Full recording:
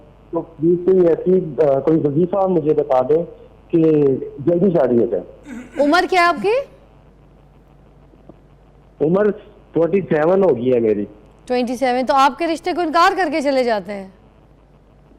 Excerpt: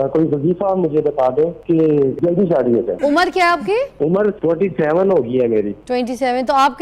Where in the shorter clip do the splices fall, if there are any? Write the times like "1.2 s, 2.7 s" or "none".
2.0 s, 2.9 s, 4.2 s, 5.8 s